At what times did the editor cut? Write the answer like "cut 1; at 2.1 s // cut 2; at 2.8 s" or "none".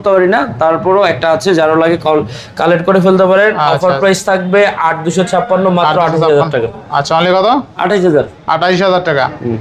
none